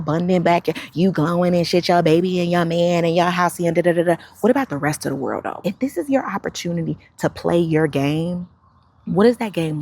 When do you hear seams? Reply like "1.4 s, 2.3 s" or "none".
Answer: 5.7 s